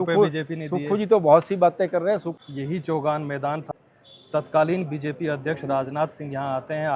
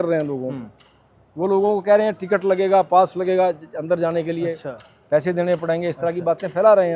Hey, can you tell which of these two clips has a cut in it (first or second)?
first